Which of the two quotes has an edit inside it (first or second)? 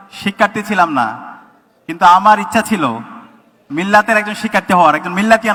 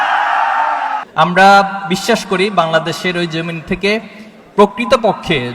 second